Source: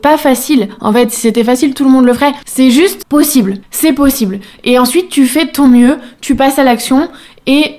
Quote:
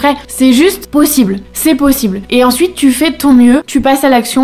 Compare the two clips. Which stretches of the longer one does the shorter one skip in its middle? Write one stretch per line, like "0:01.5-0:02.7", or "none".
0:04.4-0:04.6
0:06.0-0:06.2